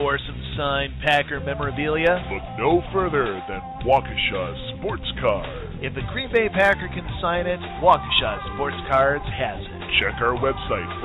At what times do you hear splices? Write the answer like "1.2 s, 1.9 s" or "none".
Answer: none